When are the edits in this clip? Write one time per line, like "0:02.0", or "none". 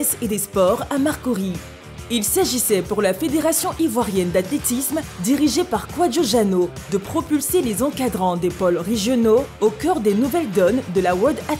none